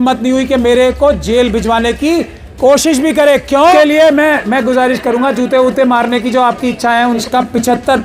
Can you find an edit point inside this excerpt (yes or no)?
yes